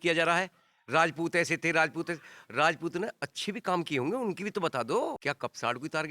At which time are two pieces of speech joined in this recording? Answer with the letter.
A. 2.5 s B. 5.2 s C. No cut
B